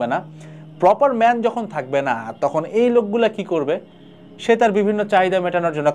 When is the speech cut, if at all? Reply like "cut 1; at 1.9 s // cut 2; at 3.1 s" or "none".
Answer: none